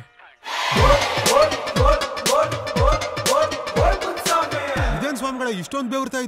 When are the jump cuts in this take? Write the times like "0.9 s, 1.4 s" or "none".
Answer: none